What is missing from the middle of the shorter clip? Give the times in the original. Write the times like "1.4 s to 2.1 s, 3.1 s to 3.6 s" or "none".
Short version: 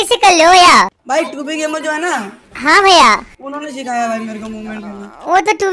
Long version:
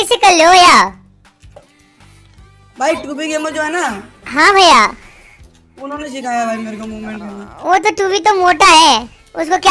1.0 s to 2.7 s, 5.1 s to 5.7 s